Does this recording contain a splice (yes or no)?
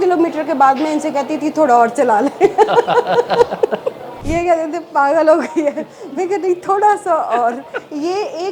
yes